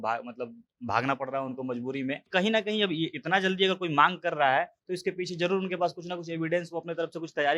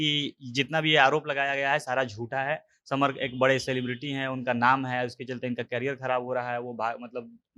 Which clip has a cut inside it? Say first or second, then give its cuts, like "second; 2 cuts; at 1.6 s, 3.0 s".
first; 1 cut; at 2.3 s